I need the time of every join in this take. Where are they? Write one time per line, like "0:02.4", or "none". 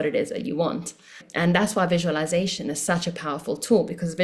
0:01.3